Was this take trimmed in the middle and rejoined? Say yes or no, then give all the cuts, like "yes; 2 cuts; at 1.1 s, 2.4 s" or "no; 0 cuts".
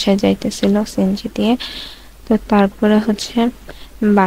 no; 0 cuts